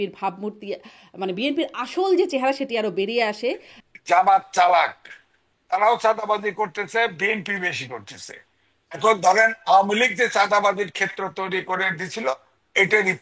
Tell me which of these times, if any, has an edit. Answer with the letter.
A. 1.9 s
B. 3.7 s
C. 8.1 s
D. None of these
B